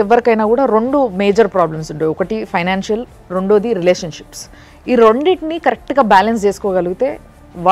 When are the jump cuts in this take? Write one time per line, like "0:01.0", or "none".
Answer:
none